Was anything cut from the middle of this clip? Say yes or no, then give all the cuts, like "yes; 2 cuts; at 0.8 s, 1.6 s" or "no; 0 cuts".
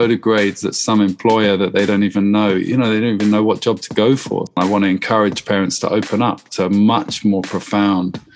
yes; 1 cut; at 4.6 s